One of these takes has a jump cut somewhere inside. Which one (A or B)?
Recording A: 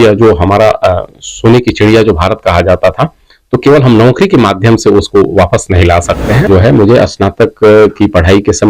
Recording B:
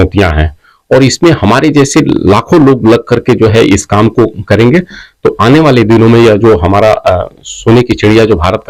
A